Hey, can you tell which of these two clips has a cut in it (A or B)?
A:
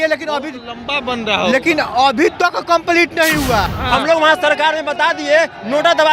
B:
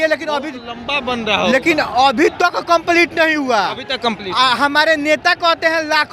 A